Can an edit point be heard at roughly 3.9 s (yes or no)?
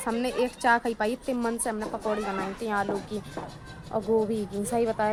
no